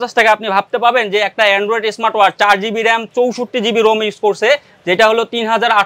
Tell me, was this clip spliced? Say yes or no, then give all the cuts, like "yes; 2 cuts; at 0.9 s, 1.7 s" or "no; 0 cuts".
no; 0 cuts